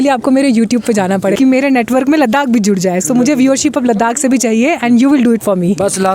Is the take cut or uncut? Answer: cut